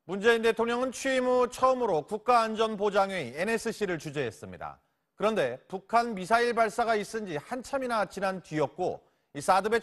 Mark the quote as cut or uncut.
cut